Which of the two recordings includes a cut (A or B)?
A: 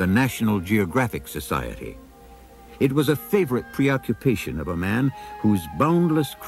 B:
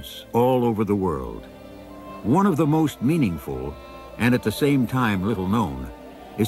B